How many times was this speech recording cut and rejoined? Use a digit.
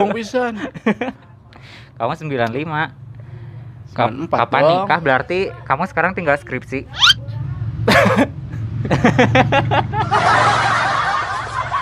1